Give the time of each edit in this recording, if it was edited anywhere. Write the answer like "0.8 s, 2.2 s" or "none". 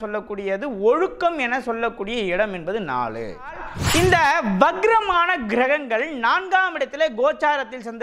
3.7 s